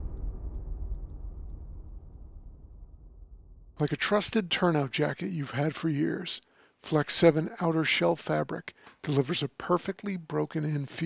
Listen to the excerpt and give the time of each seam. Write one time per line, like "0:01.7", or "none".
0:03.6